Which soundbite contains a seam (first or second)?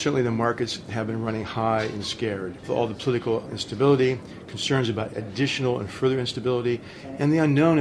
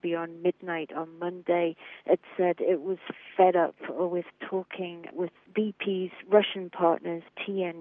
first